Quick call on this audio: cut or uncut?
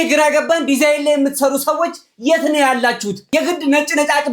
cut